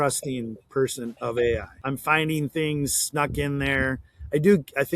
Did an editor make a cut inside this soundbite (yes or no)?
yes